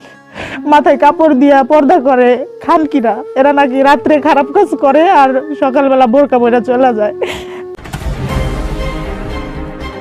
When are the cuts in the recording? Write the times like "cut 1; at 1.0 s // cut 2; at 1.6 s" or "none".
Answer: cut 1; at 7.7 s